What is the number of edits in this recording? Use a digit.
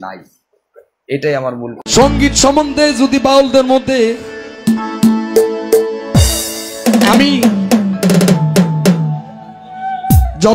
1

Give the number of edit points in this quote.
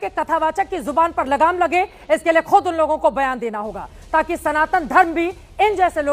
0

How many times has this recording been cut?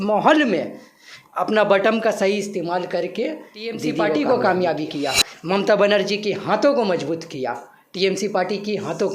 1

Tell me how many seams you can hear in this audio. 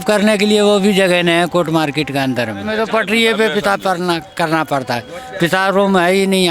1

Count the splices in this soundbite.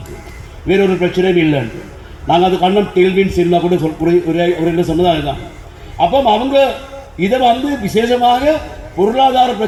0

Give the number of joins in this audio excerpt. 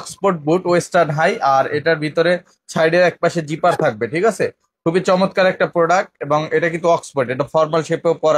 0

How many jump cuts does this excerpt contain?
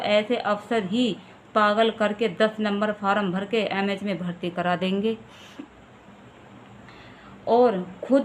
0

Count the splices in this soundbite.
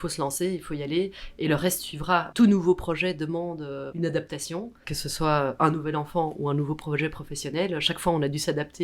2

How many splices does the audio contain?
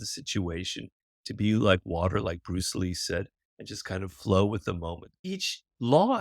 1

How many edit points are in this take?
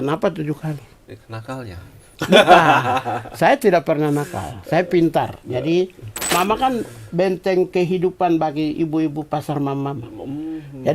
1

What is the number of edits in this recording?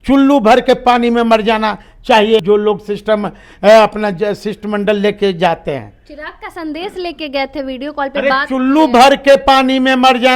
1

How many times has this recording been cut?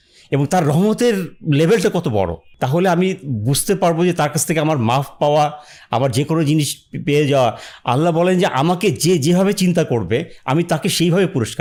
0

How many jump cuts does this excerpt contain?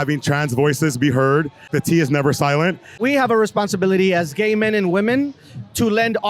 2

